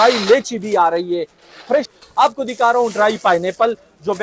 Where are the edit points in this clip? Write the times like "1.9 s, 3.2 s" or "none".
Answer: 1.9 s